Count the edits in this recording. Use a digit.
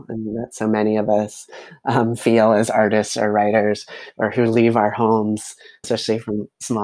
1